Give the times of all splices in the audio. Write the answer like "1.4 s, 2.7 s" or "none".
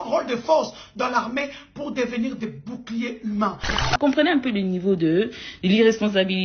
3.9 s